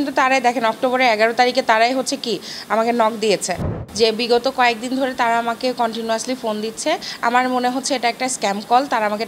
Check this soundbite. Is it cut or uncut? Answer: cut